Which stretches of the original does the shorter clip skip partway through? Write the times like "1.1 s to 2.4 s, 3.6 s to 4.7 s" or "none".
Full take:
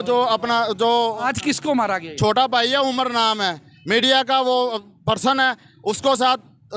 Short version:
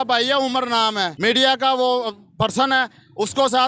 3.5 s to 3.8 s